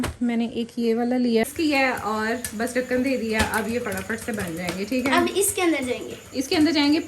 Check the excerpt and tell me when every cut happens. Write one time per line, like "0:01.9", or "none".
0:01.4